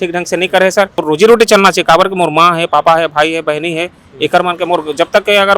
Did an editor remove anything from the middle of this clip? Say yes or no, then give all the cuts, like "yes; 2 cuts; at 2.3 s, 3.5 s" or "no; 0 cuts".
yes; 1 cut; at 1.0 s